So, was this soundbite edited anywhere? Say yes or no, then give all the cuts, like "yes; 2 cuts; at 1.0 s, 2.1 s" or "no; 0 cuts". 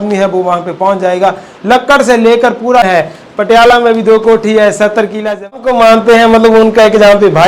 yes; 2 cuts; at 2.8 s, 5.6 s